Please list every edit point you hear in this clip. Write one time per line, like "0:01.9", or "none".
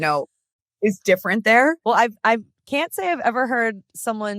0:01.8

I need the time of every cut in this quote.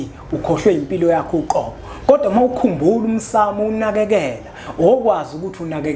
none

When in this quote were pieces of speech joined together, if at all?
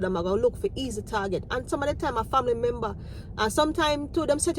none

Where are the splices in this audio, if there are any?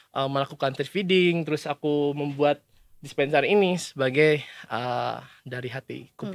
none

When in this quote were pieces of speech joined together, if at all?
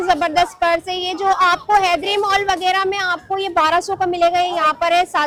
none

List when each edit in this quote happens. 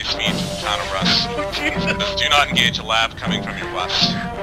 none

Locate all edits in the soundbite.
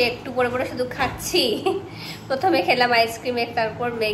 none

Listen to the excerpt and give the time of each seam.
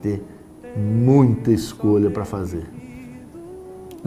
0:02.3

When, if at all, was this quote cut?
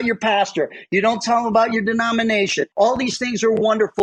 0:02.6

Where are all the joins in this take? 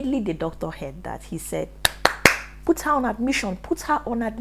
none

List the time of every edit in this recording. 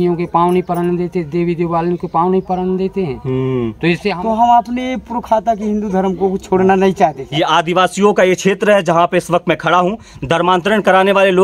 0:04.2
0:07.2

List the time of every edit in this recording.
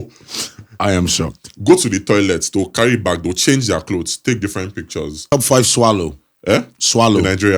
0:05.3

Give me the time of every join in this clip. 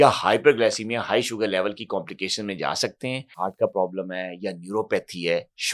0:03.2

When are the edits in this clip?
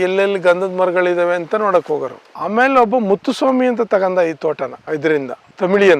0:02.2

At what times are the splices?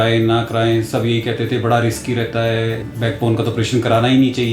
0:02.8

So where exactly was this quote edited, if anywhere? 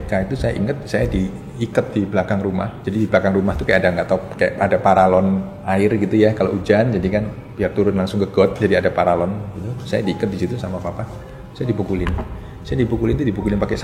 0:02.8
0:05.5
0:07.4

